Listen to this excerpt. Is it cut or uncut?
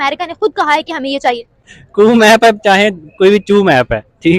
uncut